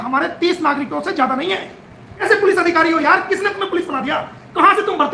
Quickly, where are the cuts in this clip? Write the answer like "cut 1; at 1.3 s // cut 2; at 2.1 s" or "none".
cut 1; at 2.2 s